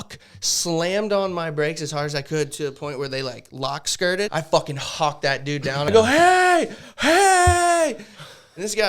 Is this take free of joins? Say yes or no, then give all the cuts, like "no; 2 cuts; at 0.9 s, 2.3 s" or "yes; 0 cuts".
no; 2 cuts; at 4.3 s, 5.9 s